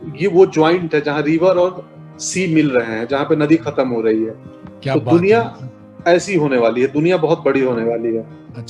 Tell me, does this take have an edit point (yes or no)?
no